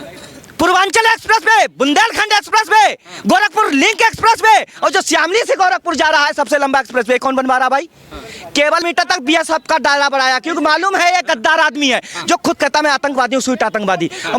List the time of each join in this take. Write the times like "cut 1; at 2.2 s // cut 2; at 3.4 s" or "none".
cut 1; at 8.8 s